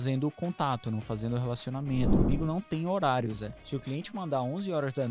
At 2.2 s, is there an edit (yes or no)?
yes